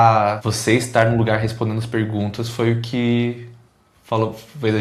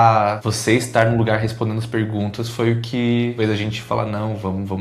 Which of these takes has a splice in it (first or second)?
second